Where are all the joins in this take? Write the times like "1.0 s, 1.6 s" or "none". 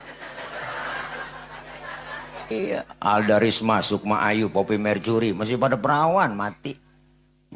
2.5 s